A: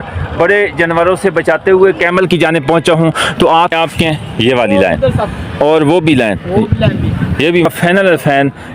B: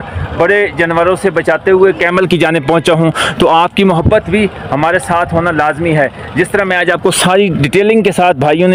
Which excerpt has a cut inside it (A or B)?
A